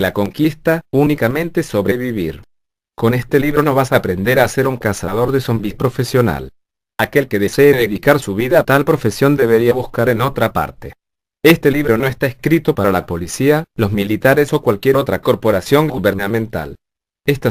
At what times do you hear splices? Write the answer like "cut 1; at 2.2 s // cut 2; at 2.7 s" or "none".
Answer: none